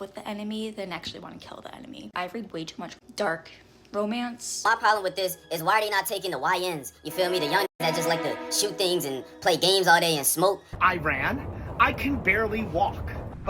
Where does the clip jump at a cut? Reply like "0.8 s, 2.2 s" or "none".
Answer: 4.5 s, 10.7 s